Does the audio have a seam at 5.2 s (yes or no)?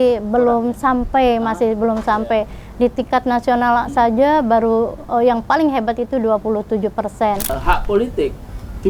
no